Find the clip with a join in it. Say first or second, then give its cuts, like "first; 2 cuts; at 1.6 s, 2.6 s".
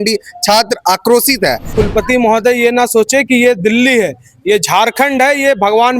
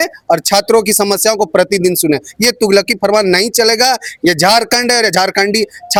first; 1 cut; at 1.7 s